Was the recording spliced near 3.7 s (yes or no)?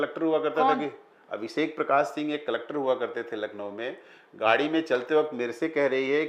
no